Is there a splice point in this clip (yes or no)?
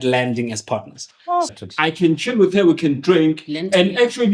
yes